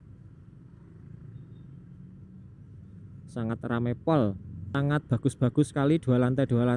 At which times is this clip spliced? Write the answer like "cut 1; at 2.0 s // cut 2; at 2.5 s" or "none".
cut 1; at 4.5 s